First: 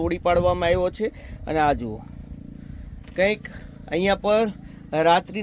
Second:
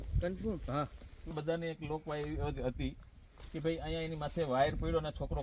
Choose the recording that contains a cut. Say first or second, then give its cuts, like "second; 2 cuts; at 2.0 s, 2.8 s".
second; 1 cut; at 1.3 s